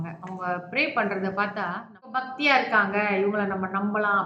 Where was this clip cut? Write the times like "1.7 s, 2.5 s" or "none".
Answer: 2.2 s